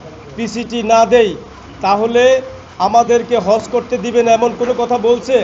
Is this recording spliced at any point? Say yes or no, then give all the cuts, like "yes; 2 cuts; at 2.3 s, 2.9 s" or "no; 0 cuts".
no; 0 cuts